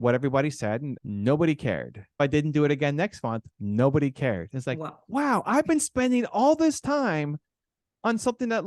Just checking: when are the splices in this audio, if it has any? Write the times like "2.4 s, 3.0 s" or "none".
0.9 s, 2.2 s